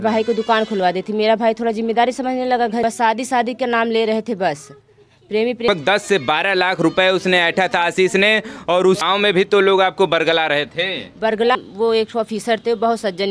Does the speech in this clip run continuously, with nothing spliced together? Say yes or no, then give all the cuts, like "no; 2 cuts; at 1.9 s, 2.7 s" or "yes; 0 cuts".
no; 4 cuts; at 2.8 s, 5.7 s, 9.0 s, 11.6 s